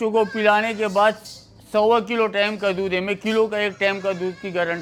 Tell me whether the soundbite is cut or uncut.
uncut